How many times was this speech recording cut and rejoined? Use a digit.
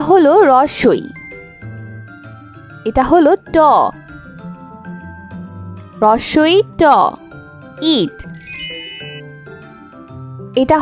0